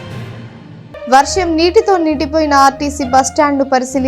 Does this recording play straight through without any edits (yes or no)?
no